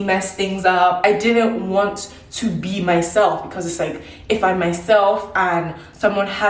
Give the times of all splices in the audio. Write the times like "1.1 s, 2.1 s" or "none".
1.0 s